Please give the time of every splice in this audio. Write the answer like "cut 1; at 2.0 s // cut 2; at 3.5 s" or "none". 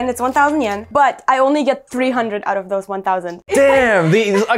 none